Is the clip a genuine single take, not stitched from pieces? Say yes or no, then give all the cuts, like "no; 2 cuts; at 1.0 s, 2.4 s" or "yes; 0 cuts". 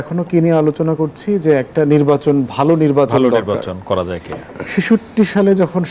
yes; 0 cuts